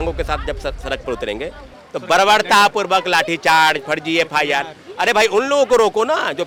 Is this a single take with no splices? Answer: yes; 0 cuts

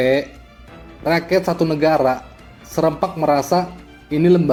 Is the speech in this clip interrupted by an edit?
no; 0 cuts

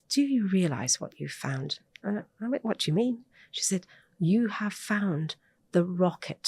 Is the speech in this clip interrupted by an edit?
no; 0 cuts

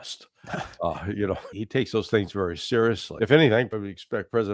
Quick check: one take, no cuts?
no; 3 cuts; at 1.6 s, 3.1 s, 3.7 s

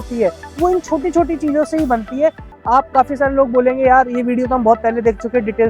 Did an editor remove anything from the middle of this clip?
yes; 1 cut; at 2.5 s

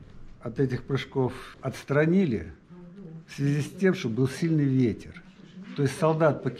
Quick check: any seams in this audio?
yes; 1 cut; at 1.5 s

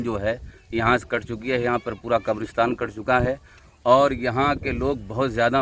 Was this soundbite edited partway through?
no; 0 cuts

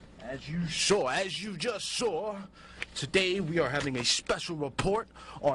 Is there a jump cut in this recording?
no; 0 cuts

